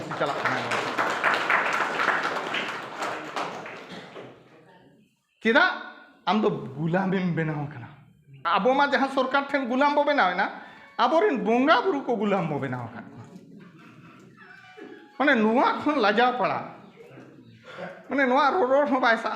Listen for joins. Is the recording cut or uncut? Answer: cut